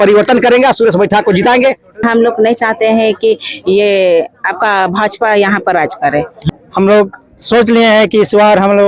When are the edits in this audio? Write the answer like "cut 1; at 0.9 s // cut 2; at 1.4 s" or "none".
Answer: cut 1; at 2.0 s // cut 2; at 6.4 s